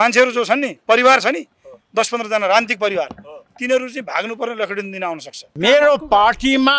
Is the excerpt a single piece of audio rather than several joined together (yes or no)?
no